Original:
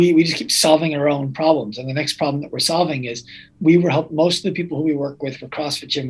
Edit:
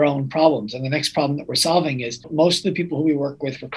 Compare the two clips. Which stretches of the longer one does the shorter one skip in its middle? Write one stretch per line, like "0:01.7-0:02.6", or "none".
0:03.3-0:04.1